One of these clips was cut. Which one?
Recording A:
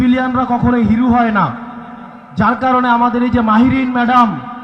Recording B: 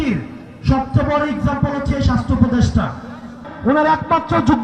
B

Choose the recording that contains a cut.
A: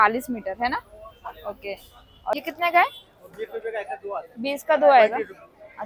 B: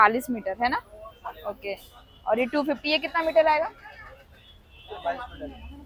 A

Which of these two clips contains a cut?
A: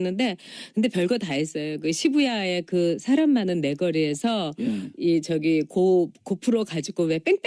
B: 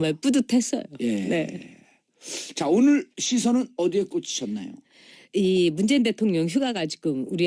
A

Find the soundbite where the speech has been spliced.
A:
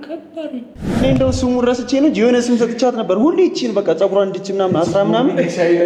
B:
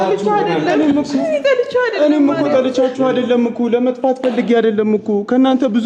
A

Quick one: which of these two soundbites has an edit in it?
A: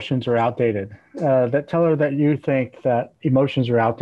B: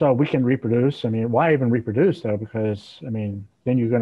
A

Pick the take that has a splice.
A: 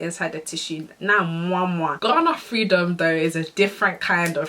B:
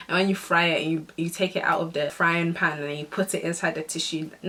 A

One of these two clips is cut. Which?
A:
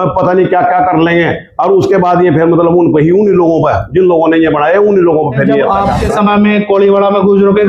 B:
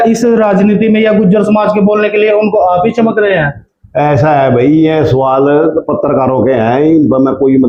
A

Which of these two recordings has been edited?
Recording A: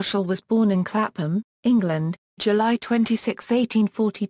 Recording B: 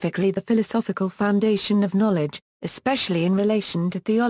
A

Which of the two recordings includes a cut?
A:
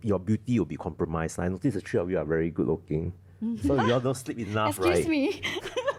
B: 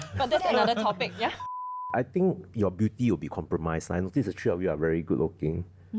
B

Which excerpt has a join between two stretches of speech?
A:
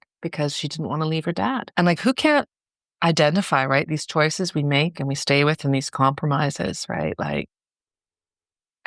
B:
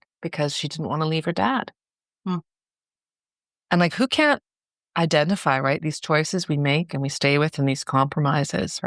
A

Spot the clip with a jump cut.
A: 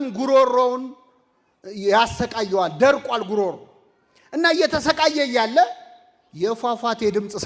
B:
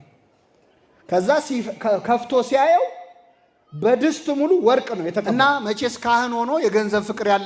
B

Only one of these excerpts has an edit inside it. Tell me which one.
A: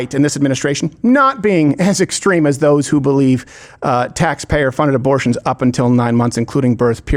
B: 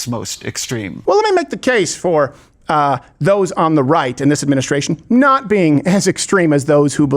B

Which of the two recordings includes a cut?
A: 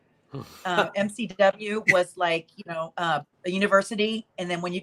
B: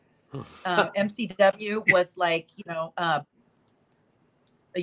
A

